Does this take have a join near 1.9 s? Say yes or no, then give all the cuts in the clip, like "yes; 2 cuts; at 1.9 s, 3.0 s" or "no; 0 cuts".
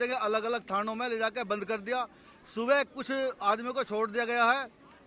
no; 0 cuts